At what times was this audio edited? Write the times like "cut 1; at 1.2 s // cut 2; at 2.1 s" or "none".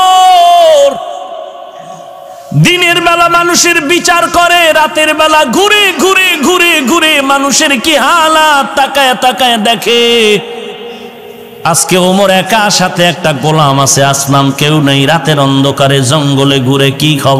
none

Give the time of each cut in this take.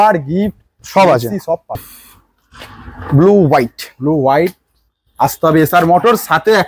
cut 1; at 1.8 s

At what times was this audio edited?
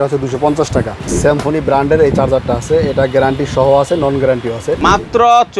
cut 1; at 1.1 s // cut 2; at 4.7 s

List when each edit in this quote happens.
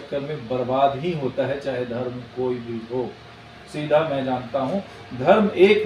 none

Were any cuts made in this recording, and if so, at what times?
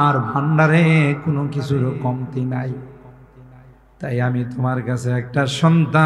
none

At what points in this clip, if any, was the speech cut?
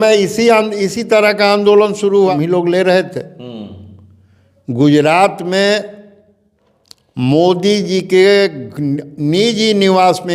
cut 1; at 2.3 s

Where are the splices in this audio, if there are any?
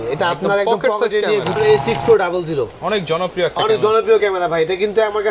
cut 1; at 1.6 s

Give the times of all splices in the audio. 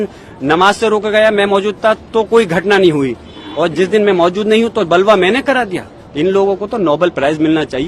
none

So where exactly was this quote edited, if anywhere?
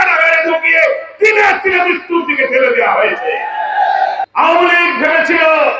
cut 1; at 4.2 s

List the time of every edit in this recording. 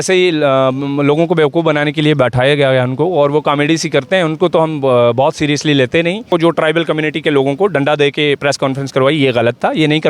cut 1; at 6.3 s

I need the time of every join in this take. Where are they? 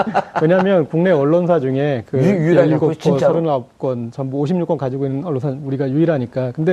none

